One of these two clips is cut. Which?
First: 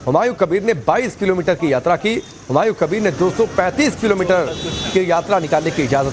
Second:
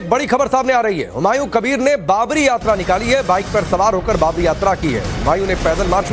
first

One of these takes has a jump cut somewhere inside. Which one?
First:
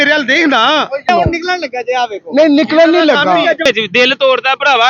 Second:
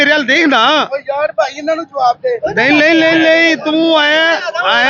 first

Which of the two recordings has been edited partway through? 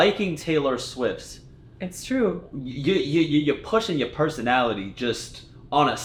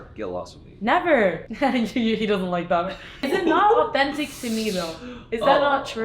second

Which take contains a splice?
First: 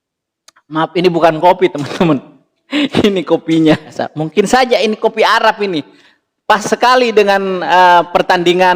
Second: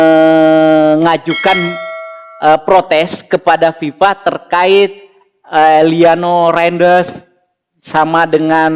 first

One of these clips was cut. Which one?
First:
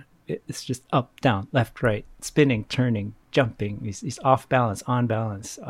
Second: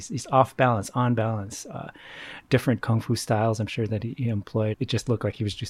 second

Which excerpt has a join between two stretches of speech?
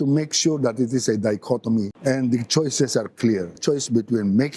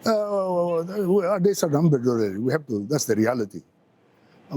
first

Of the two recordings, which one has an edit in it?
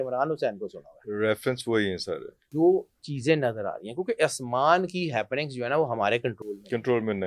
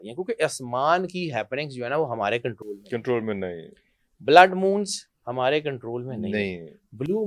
first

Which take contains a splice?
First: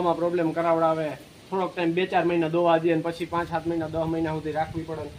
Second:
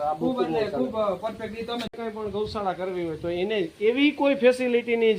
second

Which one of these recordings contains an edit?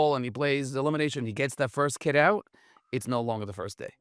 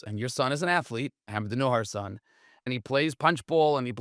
second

